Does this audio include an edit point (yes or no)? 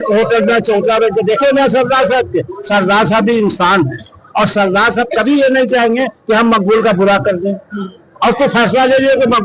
no